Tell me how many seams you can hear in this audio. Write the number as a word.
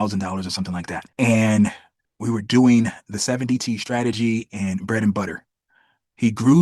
one